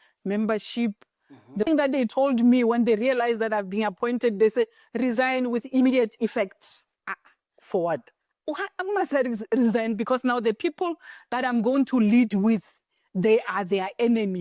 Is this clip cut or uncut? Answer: cut